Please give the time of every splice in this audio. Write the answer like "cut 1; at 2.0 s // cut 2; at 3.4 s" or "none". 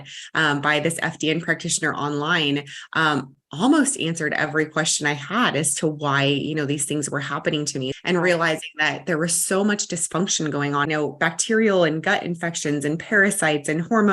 cut 1; at 8.0 s // cut 2; at 10.8 s